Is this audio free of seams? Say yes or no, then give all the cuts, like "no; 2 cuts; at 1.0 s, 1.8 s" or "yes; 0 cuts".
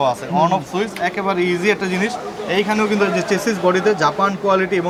yes; 0 cuts